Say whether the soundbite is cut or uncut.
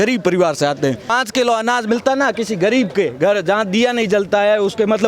cut